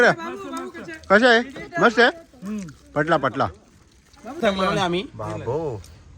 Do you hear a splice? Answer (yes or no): yes